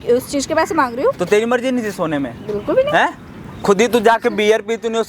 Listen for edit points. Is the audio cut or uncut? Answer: uncut